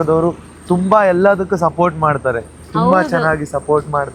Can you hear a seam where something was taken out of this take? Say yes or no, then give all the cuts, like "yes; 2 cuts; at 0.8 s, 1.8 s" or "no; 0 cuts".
no; 0 cuts